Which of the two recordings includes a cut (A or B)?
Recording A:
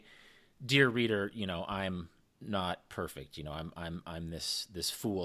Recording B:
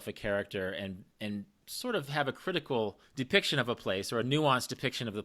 B